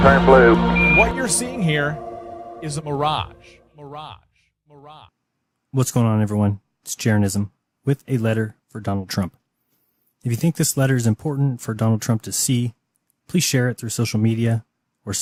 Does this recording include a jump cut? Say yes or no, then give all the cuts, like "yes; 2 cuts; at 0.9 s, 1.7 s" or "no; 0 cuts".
no; 0 cuts